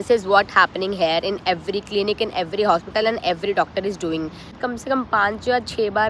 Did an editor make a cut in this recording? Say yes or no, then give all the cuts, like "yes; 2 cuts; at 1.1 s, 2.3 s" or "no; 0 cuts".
yes; 1 cut; at 4.6 s